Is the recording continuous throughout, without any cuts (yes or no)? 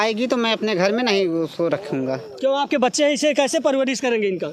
yes